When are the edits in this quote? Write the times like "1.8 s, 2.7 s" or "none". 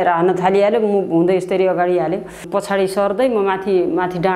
2.5 s